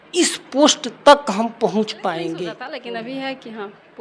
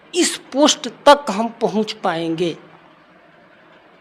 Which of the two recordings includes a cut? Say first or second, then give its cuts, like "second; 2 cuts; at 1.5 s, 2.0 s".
first; 1 cut; at 2.6 s